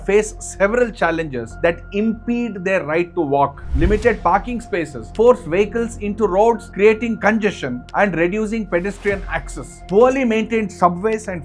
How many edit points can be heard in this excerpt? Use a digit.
0